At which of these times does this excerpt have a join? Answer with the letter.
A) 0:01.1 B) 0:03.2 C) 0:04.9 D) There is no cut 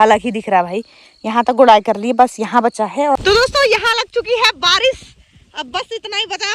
B